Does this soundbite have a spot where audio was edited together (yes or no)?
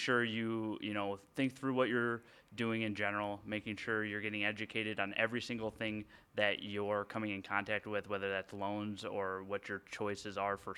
no